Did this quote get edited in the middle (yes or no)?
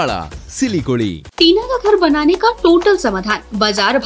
yes